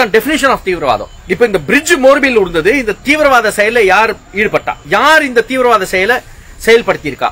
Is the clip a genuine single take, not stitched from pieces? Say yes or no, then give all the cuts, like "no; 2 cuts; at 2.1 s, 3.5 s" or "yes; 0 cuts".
no; 2 cuts; at 1.2 s, 4.8 s